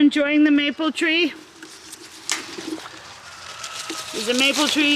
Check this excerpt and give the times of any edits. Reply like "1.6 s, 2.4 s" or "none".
none